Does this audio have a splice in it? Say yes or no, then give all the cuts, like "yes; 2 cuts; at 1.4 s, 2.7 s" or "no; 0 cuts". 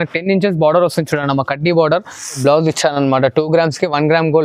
yes; 1 cut; at 2.4 s